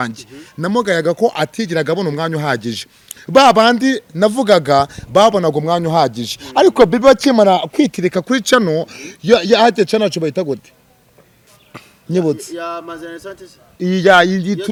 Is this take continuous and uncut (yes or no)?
yes